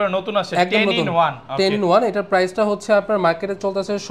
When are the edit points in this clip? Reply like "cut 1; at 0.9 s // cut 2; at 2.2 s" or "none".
none